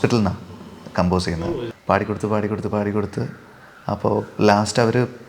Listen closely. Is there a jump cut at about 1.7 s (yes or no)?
yes